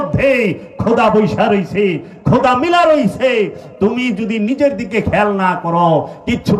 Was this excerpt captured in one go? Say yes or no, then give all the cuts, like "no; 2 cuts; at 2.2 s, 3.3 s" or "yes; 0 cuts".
yes; 0 cuts